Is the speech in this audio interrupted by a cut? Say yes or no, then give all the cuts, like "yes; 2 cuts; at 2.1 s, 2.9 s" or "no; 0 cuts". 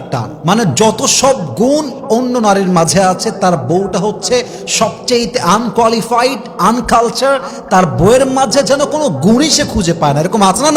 no; 0 cuts